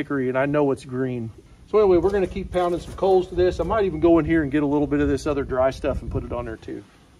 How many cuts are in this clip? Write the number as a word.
one